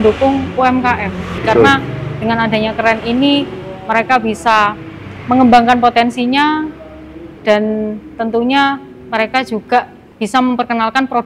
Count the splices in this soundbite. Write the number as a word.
one